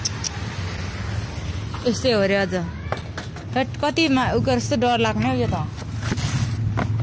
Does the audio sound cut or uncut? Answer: uncut